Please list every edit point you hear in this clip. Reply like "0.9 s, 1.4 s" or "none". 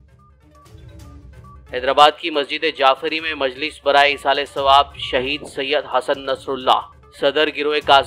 1.4 s